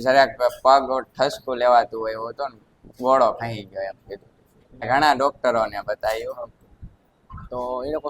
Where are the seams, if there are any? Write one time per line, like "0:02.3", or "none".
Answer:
0:04.8